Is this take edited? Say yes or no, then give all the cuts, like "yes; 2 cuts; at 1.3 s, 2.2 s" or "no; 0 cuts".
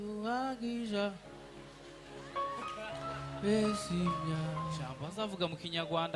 yes; 1 cut; at 4.9 s